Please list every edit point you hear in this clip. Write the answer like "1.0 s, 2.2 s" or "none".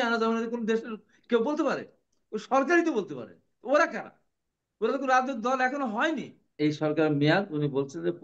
6.5 s